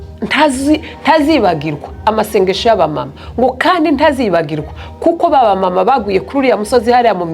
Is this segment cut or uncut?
uncut